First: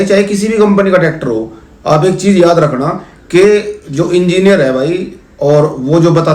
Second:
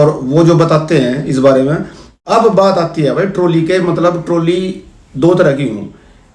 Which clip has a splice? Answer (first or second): second